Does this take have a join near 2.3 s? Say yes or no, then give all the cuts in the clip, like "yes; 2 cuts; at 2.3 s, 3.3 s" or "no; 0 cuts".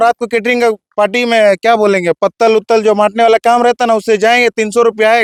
no; 0 cuts